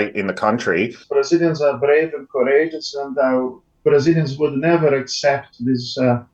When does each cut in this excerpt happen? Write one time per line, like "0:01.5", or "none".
0:01.0